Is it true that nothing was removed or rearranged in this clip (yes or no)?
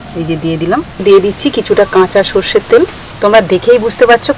no